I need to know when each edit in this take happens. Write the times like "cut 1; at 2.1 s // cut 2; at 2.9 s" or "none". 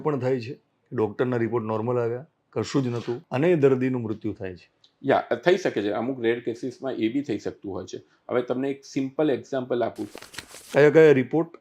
cut 1; at 3.2 s // cut 2; at 10.1 s